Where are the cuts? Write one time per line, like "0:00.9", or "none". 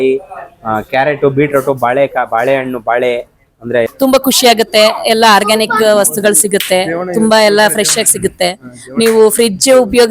0:03.9